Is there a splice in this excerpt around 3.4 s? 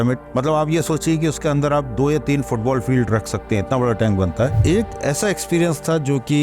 no; 1 cut; at 4.6 s

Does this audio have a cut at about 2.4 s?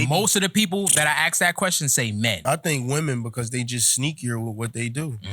yes; 1 cut; at 2.4 s

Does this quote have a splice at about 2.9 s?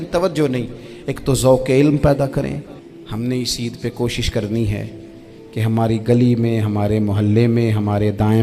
yes; 1 cut; at 2.9 s

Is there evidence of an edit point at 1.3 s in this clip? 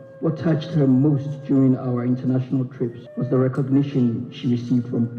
no; 1 cut; at 3.1 s

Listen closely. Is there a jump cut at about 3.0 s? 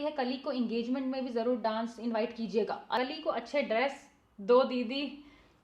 yes; 1 cut; at 3.0 s

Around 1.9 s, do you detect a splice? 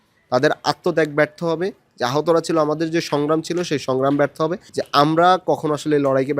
no; 1 cut; at 4.7 s

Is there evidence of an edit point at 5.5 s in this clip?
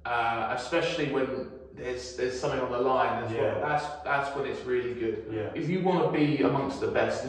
yes; 1 cut; at 5.5 s

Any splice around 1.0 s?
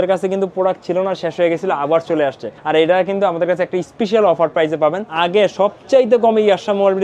no; 2 cuts; at 2.5 s, 5.1 s

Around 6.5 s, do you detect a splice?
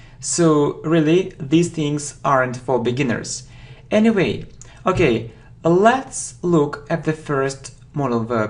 yes; 1 cut; at 6.5 s

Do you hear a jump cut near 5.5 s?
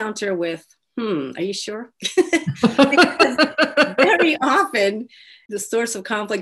yes; 1 cut; at 5.5 s

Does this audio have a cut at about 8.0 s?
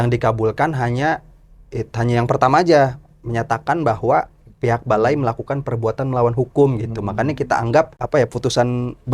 yes; 1 cut; at 8.0 s

